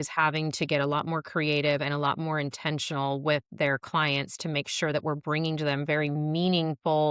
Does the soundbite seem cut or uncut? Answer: uncut